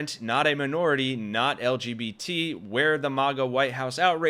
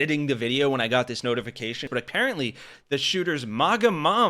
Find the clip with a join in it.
second; 1 cut; at 1.9 s

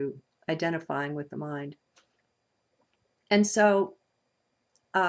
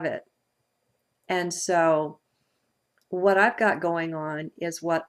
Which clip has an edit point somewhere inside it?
second; 1 cut; at 3.3 s

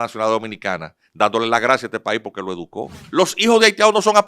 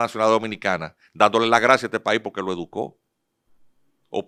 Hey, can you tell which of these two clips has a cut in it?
first; 1 cut; at 3.0 s

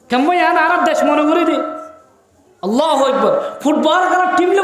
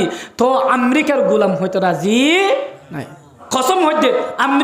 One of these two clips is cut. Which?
second; 1 cut; at 3.4 s

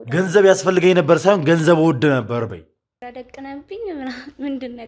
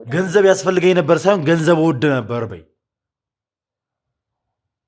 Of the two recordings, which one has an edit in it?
first; 1 cut; at 2.9 s

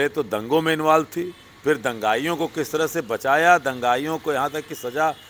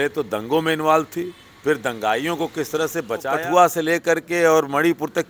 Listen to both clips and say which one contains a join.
second; 1 cut; at 3.3 s

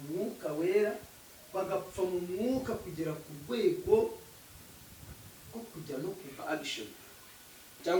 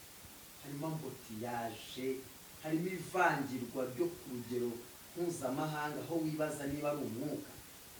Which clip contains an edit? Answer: first; 1 cut; at 6.4 s

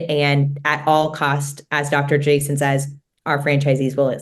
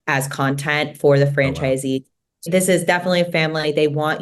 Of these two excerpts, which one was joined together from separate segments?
second; 1 cut; at 2.5 s

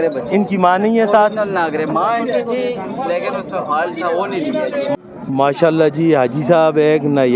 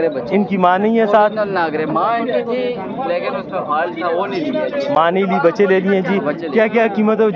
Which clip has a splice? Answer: first; 1 cut; at 4.9 s

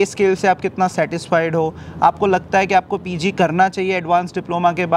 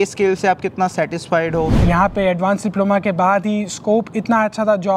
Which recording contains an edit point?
second; 1 cut; at 1.8 s

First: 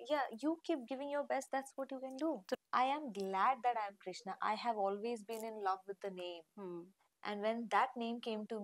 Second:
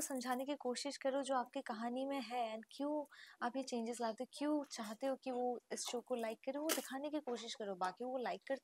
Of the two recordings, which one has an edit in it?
first; 1 cut; at 2.6 s

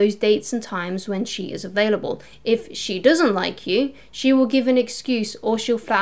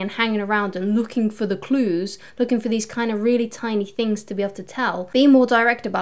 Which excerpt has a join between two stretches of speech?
second; 1 cut; at 5.0 s

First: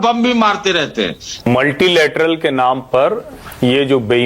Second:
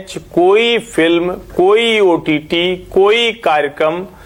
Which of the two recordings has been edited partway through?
first; 1 cut; at 1.5 s

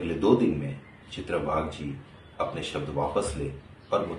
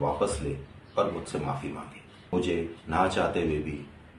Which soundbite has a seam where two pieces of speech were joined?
second; 1 cut; at 2.3 s

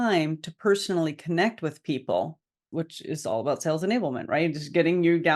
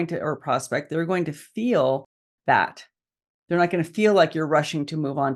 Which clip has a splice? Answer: first; 1 cut; at 2.6 s

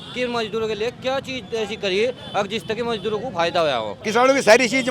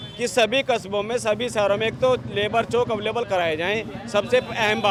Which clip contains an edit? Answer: first; 1 cut; at 3.9 s

